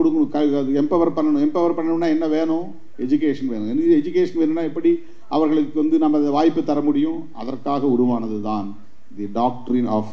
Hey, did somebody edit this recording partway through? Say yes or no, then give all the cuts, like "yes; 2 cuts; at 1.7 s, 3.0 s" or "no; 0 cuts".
no; 0 cuts